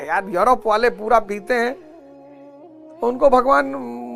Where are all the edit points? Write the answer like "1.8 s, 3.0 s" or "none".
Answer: none